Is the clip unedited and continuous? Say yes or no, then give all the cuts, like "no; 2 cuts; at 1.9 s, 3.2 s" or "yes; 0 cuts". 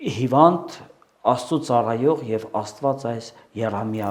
yes; 0 cuts